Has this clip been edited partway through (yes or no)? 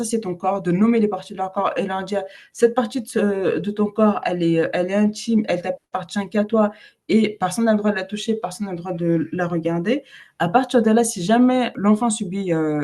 yes